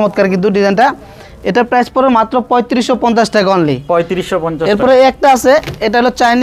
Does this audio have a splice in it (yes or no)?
no